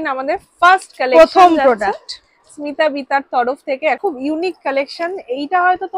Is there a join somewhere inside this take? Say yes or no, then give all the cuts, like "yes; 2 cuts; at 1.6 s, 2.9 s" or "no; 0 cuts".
yes; 1 cut; at 4.0 s